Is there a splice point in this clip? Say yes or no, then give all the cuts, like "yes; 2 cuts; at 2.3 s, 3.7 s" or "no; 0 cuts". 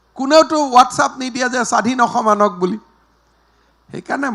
no; 0 cuts